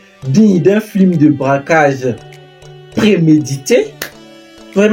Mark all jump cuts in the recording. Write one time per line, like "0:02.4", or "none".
none